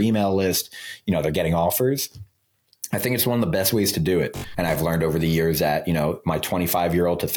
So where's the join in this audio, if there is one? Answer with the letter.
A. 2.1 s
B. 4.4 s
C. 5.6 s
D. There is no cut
B